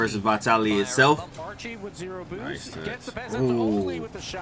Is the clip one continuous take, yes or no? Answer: no